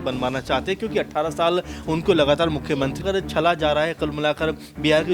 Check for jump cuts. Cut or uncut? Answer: cut